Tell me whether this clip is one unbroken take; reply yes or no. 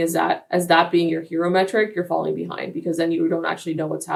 yes